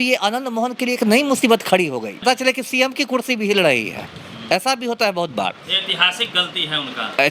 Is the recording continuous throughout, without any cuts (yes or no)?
no